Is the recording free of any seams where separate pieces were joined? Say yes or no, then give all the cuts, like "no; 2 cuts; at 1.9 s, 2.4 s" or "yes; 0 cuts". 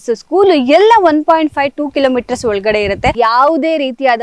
no; 1 cut; at 3.1 s